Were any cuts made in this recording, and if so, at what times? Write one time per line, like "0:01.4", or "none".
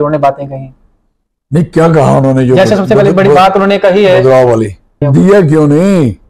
0:05.1